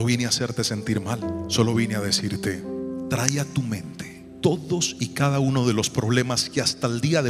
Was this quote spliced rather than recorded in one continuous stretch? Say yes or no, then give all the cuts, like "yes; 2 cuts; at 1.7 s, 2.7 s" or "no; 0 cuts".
no; 0 cuts